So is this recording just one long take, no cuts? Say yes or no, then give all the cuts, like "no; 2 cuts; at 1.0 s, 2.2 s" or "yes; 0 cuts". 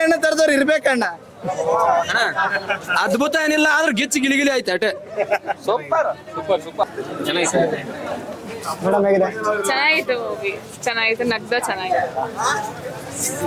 yes; 0 cuts